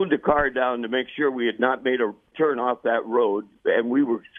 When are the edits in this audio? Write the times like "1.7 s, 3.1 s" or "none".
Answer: 2.3 s, 3.5 s